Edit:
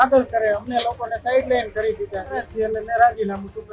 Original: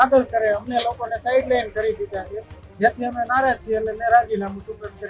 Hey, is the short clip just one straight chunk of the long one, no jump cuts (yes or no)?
no